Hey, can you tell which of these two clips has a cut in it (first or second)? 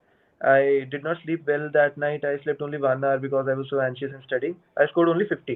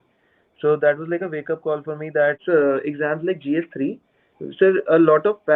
second